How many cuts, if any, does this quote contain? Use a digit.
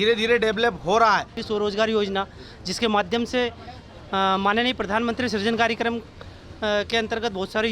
1